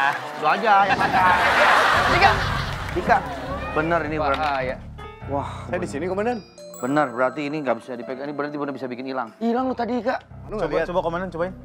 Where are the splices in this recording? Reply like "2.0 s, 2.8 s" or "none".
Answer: 2.1 s, 10.4 s

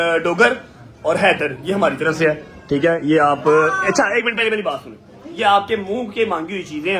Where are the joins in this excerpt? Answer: none

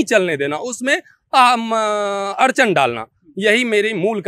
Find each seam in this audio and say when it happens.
none

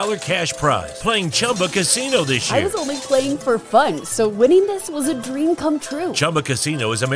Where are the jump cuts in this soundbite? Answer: none

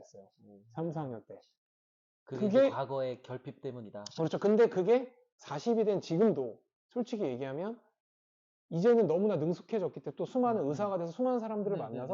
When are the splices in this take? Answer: none

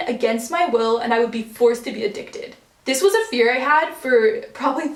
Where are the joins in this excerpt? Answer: none

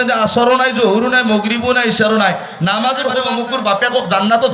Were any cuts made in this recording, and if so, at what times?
3.2 s

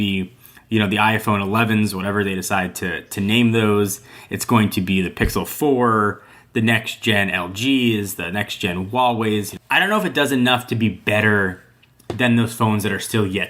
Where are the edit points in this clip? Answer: 9.6 s

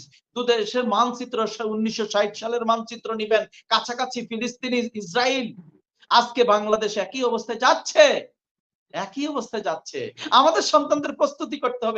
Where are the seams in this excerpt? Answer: none

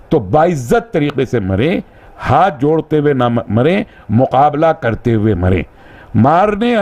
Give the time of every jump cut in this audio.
none

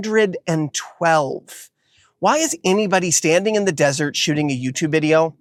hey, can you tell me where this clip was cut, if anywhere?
none

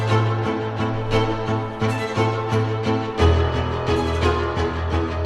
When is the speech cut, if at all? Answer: none

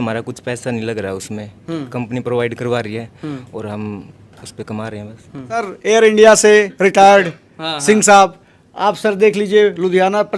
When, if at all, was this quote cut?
5.7 s

